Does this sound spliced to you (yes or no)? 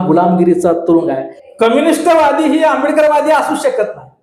yes